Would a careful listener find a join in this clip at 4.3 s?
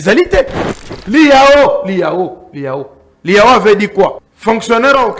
yes; 1 cut; at 4.3 s

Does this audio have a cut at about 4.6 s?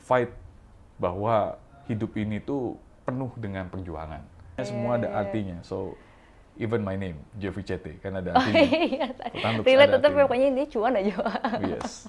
yes; 1 cut; at 4.6 s

